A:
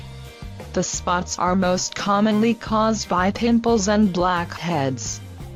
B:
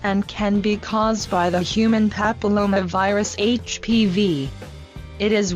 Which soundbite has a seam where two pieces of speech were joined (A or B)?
B